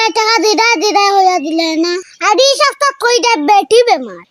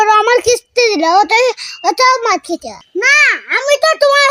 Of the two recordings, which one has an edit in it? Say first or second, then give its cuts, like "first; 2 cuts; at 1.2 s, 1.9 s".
second; 1 cut; at 2.7 s